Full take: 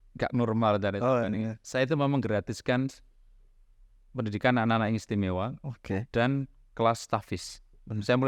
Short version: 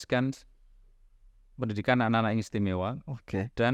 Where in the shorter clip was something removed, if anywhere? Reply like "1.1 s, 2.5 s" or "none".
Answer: none